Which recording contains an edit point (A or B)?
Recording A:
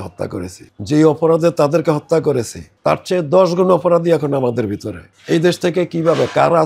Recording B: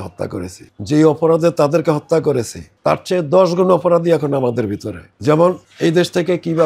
A